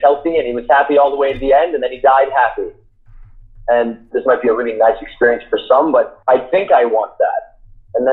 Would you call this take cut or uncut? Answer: cut